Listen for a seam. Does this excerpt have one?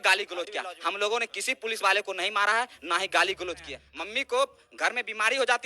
yes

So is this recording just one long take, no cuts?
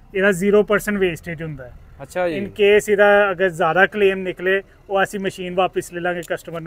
yes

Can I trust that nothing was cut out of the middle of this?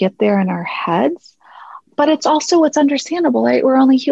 no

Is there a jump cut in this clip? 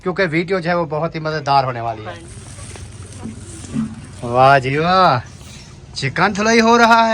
yes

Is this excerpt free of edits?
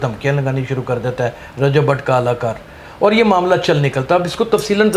yes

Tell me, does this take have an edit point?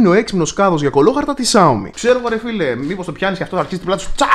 yes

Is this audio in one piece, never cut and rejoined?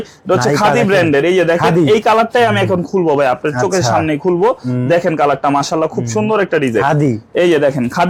yes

